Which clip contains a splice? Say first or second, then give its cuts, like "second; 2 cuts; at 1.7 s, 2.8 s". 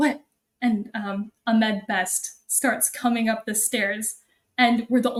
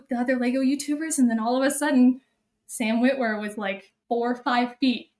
second; 1 cut; at 3.9 s